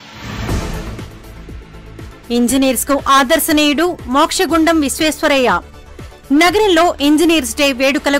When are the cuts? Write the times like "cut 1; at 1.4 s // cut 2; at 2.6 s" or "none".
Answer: cut 1; at 0.9 s